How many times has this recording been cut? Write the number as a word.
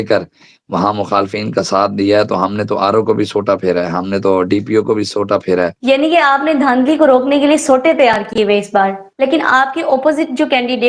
two